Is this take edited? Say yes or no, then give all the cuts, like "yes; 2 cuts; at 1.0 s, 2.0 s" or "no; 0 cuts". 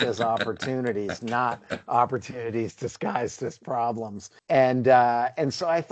no; 0 cuts